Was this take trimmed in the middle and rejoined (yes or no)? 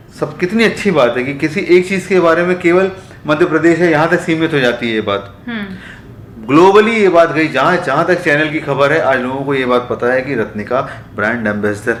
no